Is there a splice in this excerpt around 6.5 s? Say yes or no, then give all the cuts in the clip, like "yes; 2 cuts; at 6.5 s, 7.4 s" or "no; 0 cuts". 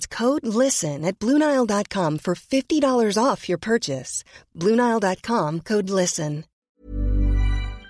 yes; 1 cut; at 6.5 s